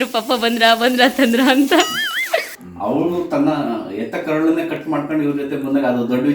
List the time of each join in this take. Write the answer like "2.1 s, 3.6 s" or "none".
2.5 s

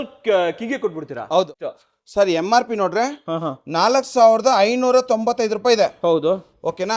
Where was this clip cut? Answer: 1.5 s

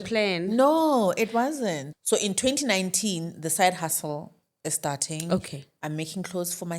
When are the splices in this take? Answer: 1.9 s

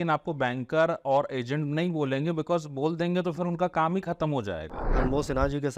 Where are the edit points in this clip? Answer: 4.9 s

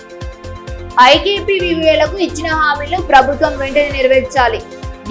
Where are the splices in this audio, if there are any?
0.9 s

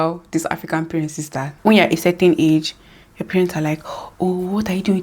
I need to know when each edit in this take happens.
1.5 s

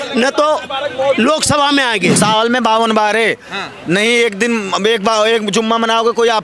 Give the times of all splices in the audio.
2.2 s

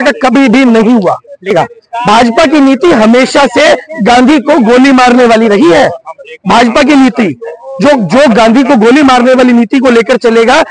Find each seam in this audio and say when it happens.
1.5 s

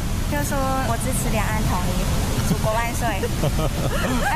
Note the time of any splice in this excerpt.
none

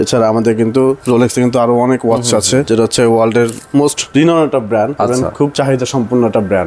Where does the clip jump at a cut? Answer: 2.6 s, 4.0 s, 5.1 s

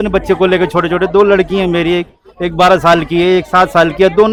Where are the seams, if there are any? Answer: none

